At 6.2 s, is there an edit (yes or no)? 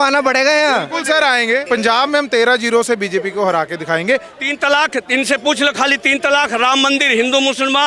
no